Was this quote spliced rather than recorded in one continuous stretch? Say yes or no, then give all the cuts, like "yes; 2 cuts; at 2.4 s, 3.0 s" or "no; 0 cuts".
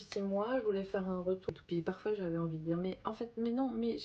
yes; 1 cut; at 1.5 s